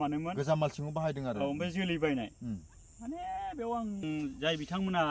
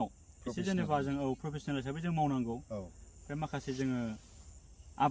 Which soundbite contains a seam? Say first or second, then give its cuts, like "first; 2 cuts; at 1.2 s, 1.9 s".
first; 1 cut; at 4.0 s